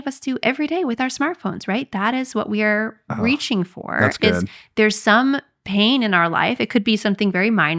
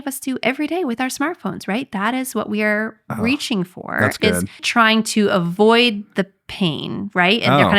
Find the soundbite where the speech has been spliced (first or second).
second